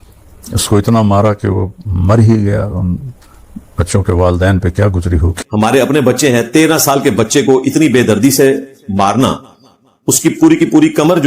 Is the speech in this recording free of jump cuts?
no; 1 cut; at 5.4 s

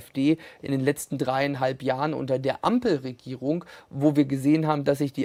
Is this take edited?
no; 0 cuts

